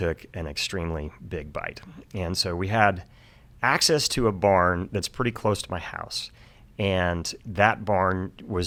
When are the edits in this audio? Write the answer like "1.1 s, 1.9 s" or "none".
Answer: none